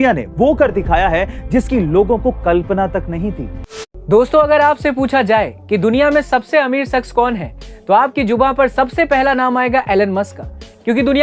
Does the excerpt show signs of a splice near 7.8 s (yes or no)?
no